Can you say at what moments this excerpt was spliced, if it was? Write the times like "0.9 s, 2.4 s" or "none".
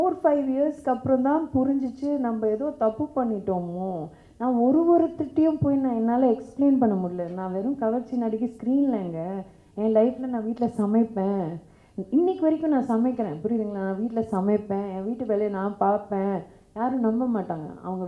none